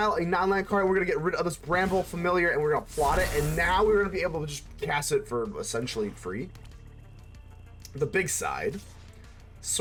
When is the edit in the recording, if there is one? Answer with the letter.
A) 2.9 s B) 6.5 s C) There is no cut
C